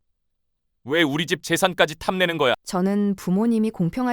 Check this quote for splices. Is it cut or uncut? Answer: cut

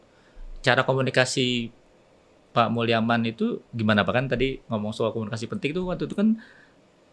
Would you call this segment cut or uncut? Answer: uncut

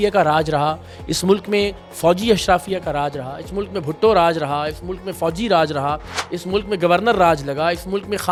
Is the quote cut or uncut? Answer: uncut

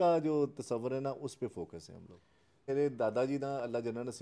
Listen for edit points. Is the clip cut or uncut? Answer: cut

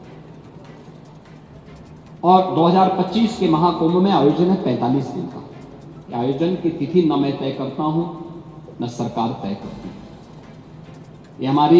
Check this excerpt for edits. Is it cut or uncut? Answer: uncut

